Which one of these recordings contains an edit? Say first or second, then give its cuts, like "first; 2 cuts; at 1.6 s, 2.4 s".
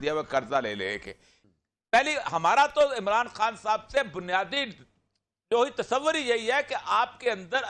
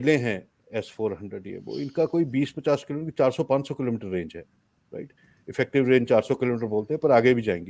first; 1 cut; at 1.4 s